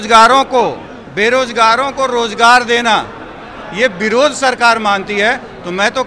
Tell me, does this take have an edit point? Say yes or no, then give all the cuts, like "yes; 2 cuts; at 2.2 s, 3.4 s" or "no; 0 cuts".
no; 0 cuts